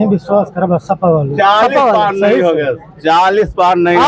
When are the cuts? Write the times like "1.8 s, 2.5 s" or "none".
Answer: none